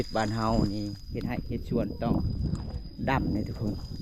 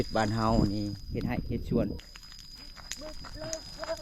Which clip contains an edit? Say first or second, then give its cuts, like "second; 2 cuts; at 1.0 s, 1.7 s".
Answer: second; 1 cut; at 1.9 s